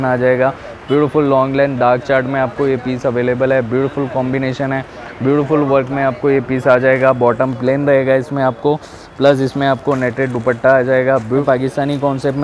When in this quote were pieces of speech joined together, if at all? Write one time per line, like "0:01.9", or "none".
0:11.4